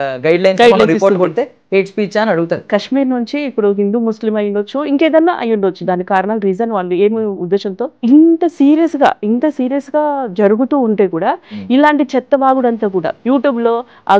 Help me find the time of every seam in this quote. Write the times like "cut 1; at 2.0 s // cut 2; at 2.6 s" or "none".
cut 1; at 2.6 s // cut 2; at 7.9 s // cut 3; at 13.1 s